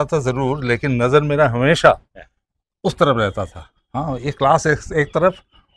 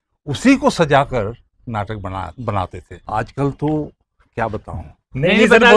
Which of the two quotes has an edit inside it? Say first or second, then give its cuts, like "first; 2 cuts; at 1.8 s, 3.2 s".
second; 1 cut; at 2.9 s